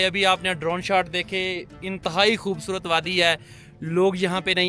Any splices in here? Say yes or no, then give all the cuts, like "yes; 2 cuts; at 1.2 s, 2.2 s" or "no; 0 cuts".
no; 0 cuts